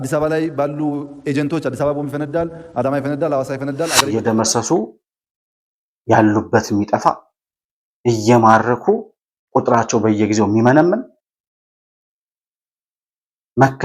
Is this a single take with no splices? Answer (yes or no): no